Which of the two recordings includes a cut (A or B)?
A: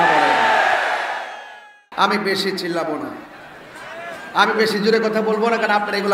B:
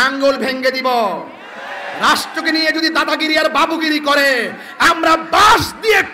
A